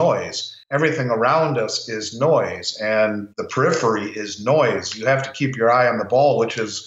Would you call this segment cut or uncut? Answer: uncut